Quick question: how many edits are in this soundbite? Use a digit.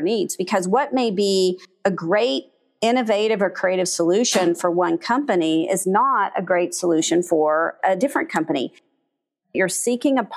2